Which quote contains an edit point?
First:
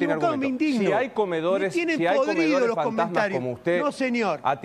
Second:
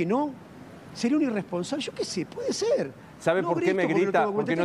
second; 1 cut; at 3.0 s

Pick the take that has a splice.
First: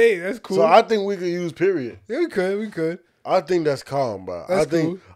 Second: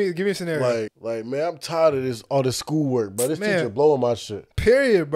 second; 1 cut; at 1.0 s

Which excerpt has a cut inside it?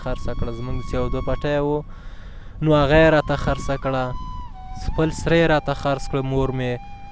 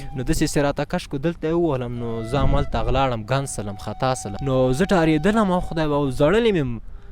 second; 1 cut; at 4.3 s

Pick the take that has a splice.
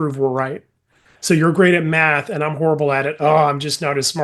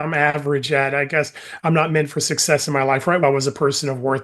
second; 1 cut; at 3.2 s

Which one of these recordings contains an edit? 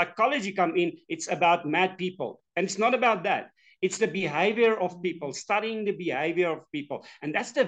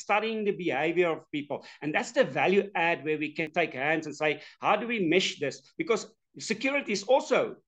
second; 1 cut; at 3.5 s

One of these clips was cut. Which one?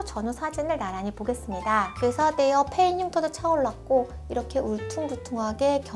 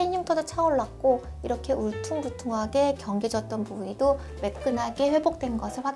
first; 1 cut; at 1.9 s

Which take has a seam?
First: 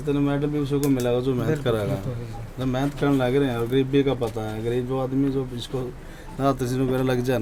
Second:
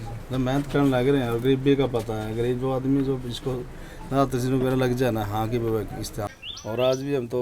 second; 1 cut; at 6.3 s

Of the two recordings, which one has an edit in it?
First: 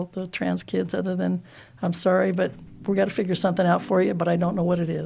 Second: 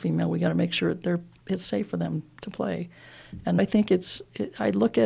second; 1 cut; at 3.6 s

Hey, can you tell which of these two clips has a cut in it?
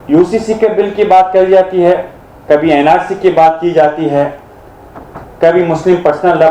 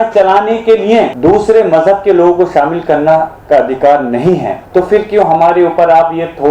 second; 2 cuts; at 1.1 s, 4.6 s

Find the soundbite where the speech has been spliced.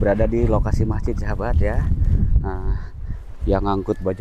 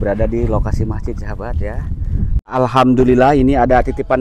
second; 1 cut; at 2.5 s

